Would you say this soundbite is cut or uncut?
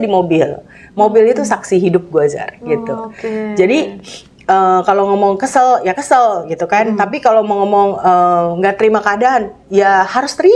uncut